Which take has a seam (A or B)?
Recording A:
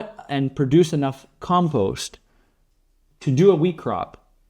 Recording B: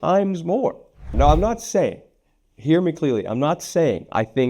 B